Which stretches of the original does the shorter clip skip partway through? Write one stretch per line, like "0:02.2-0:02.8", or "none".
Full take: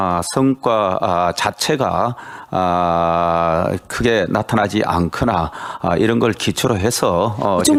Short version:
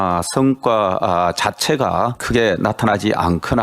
0:02.2-0:03.9

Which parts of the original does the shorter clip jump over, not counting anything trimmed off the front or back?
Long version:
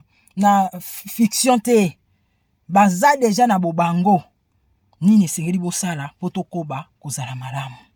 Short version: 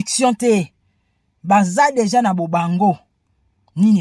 none

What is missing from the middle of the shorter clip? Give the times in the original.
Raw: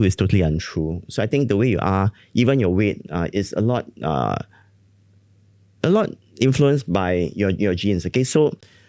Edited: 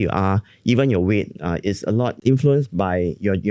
0:03.9-0:06.3

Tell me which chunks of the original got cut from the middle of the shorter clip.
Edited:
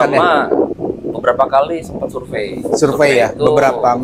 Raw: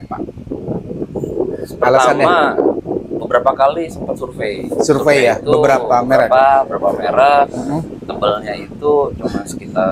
none

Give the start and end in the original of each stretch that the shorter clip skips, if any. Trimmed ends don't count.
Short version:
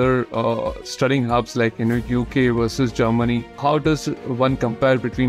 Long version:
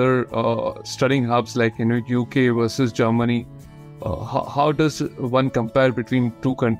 0:03.5-0:04.5

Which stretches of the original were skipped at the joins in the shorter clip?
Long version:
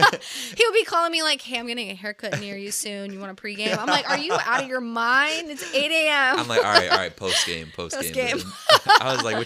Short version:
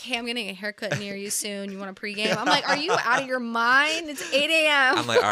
none

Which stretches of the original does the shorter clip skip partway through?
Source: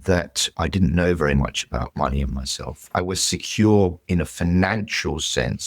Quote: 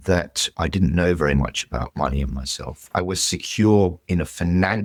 none

